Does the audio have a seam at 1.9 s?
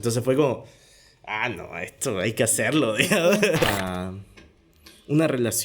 no; 1 cut; at 3.6 s

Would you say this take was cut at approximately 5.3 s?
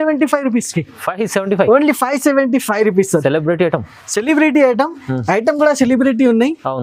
no; 0 cuts

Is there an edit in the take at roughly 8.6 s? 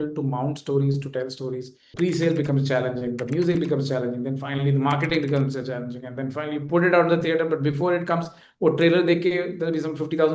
no; 1 cut; at 1.9 s

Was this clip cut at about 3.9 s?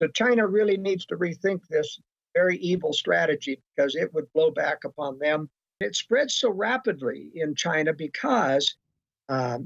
no; 1 cut; at 5.8 s

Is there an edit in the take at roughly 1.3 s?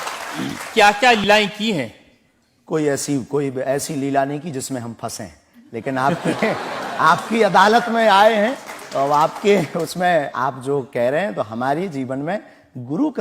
yes; 1 cut; at 1.3 s

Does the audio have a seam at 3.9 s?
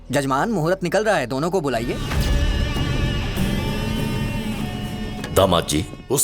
no; 1 cut; at 2.0 s

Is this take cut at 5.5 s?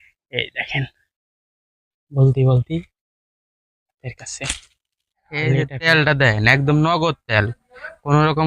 yes; 1 cut; at 5.5 s

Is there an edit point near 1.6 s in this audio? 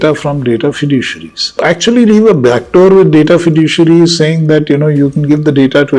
yes; 1 cut; at 1.6 s

